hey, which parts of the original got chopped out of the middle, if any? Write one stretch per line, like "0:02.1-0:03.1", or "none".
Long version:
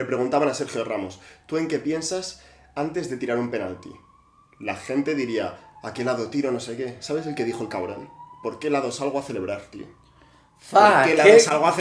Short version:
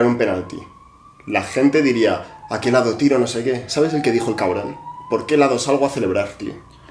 none